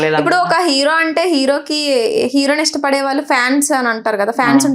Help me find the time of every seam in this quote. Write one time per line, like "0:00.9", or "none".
none